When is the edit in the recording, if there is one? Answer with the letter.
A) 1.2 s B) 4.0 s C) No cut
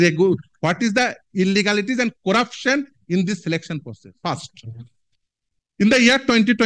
B